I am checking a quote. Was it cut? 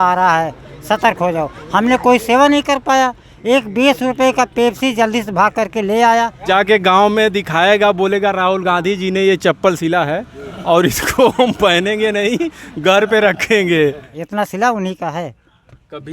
yes; 2 cuts; at 6.4 s, 14.1 s

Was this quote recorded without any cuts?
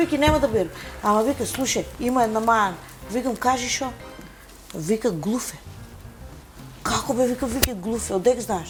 yes; 0 cuts

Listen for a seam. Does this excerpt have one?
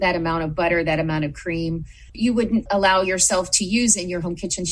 yes; 1 cut; at 2.7 s

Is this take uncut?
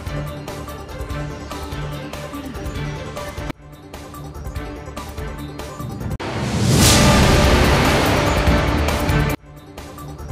no; 1 cut; at 8.8 s

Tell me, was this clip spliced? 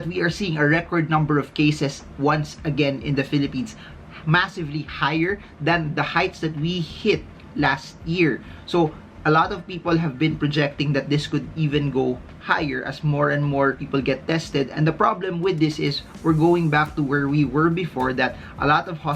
no; 0 cuts

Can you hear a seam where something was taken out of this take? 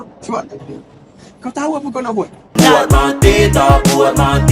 yes; 1 cut; at 2.4 s

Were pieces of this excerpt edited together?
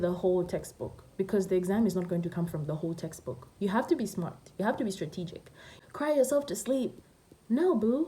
yes; 1 cut; at 5.8 s

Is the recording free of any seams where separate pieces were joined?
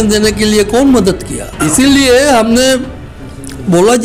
no; 1 cut; at 1.6 s

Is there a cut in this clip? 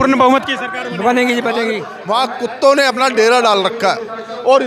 yes; 1 cut; at 1.9 s

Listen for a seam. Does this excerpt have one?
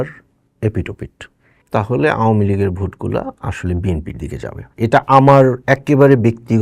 yes; 1 cut; at 1.5 s

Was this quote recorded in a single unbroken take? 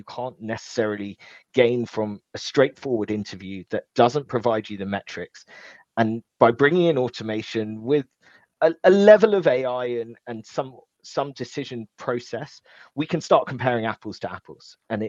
yes; 0 cuts

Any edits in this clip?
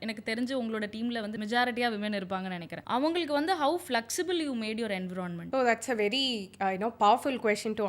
yes; 3 cuts; at 1.3 s, 2.7 s, 5.4 s

